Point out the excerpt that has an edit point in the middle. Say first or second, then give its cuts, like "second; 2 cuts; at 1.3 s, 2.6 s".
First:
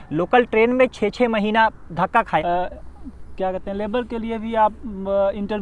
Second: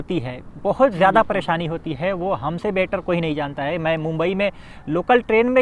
first; 1 cut; at 2.4 s